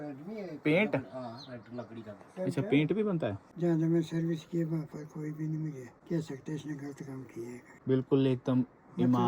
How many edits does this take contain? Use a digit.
3